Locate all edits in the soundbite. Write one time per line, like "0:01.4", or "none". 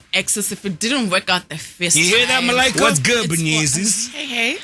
0:02.7